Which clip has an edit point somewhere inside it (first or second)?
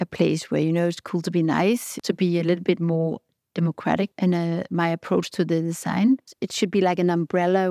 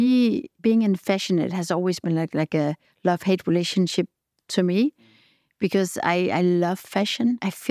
first